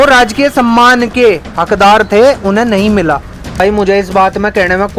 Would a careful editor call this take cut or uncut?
cut